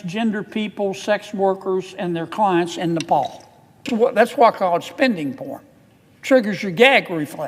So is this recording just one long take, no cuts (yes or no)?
no